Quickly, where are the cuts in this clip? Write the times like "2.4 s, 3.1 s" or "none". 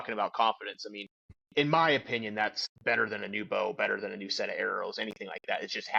1.0 s, 2.7 s